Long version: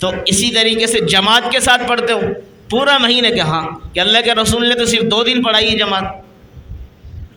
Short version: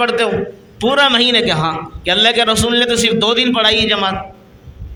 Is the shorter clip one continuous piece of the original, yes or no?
yes